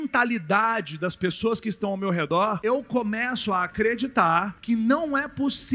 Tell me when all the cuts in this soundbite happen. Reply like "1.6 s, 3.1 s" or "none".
2.3 s, 4.5 s